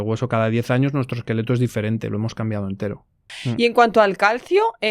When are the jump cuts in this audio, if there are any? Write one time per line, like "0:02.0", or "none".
0:03.3